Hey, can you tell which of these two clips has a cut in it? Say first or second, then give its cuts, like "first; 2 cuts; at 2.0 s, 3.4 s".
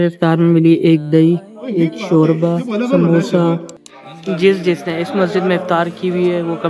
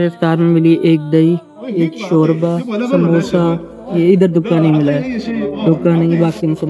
first; 1 cut; at 3.7 s